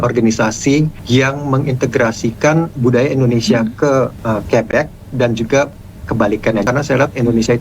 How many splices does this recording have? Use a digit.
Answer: 4